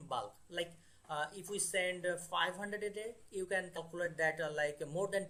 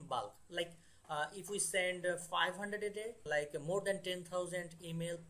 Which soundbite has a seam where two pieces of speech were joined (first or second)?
second